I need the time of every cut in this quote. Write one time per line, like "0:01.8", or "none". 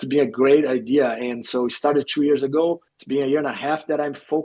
0:02.9